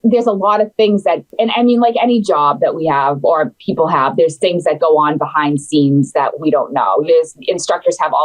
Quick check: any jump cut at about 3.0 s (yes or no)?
no